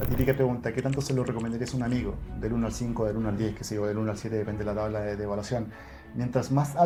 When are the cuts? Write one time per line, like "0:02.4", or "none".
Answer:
none

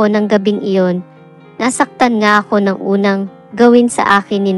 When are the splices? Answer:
0:01.3

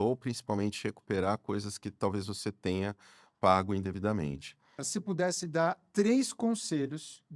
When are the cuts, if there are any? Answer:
0:04.9

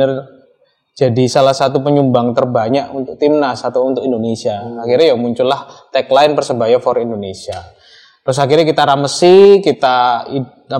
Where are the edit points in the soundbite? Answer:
none

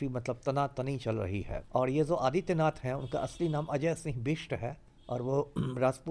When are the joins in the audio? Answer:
0:01.6

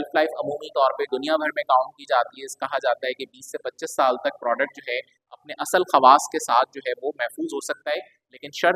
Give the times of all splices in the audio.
0:01.1

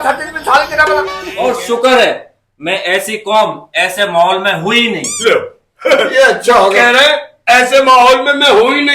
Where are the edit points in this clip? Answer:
0:01.2

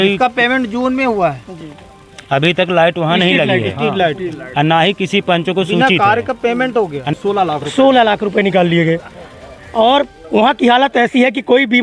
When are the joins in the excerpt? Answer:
0:07.1

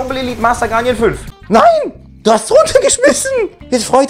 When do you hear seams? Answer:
0:01.3

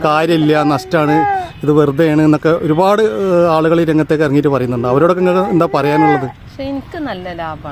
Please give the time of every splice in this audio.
none

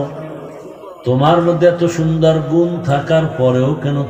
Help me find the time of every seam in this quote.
none

